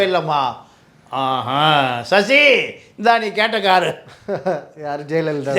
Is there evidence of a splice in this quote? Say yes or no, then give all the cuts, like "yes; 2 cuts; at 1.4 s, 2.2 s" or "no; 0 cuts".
no; 0 cuts